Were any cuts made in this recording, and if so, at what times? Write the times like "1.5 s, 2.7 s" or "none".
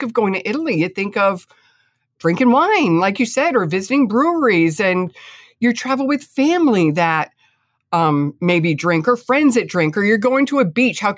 none